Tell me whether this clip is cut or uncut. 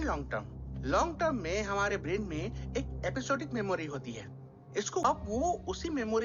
cut